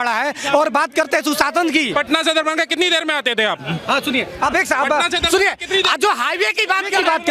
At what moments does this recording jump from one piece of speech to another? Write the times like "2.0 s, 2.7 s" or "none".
1.9 s

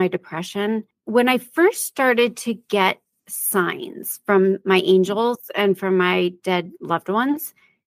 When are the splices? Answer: 0.9 s

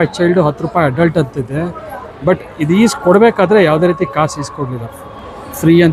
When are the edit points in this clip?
none

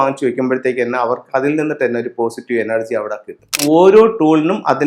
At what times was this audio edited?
3.6 s

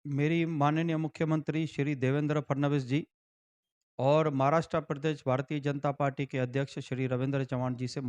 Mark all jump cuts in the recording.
none

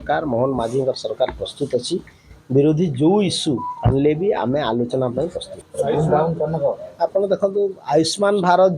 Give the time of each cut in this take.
none

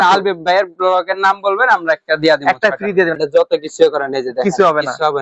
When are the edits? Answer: 3.2 s

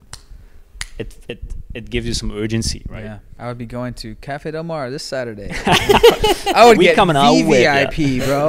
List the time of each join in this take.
3.3 s

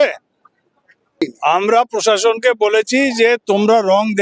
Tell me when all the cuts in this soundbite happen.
1.2 s

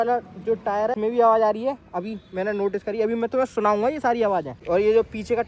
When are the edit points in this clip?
0.9 s, 4.5 s

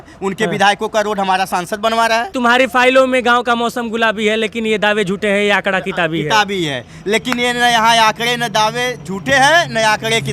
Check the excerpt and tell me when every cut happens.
2.3 s

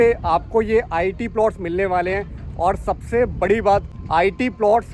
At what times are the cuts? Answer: 4.0 s

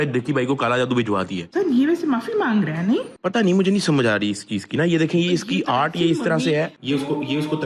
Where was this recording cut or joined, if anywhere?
1.4 s

